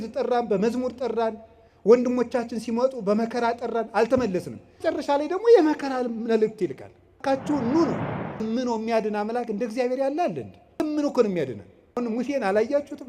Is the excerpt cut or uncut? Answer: cut